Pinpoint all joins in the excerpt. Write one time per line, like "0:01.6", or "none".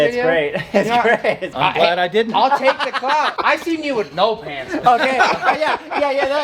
0:01.5
0:03.3